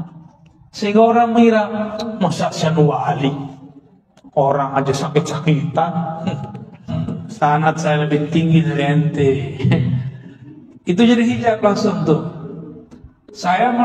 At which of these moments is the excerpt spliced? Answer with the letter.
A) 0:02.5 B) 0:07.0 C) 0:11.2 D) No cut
B